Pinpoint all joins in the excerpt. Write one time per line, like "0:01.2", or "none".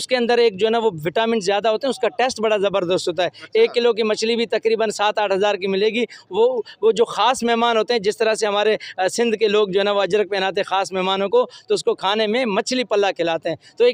none